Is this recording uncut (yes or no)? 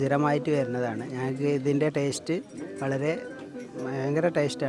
yes